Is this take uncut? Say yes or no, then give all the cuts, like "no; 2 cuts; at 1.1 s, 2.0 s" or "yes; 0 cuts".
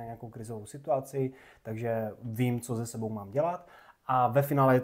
yes; 0 cuts